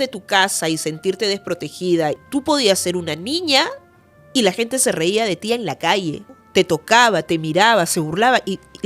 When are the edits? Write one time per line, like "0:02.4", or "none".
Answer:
0:02.2
0:06.3